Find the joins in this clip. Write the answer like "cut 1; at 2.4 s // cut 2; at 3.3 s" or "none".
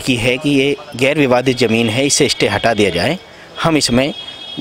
none

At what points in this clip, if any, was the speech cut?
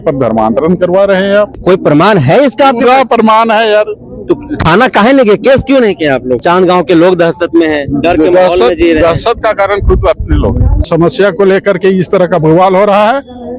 cut 1; at 6.4 s // cut 2; at 10.9 s

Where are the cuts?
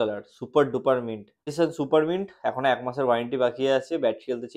cut 1; at 1.4 s

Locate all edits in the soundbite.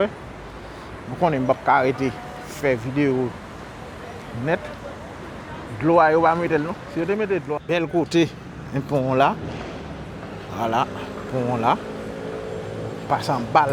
cut 1; at 7.6 s

